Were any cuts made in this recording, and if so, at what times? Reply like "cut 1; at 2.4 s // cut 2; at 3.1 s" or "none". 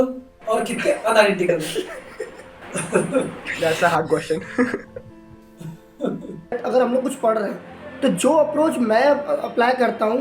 cut 1; at 6.5 s